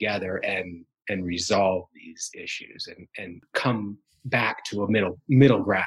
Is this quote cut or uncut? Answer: cut